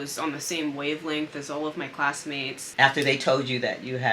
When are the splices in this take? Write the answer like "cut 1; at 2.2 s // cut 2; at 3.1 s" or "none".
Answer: cut 1; at 2.6 s